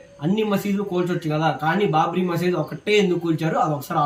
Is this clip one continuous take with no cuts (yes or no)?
yes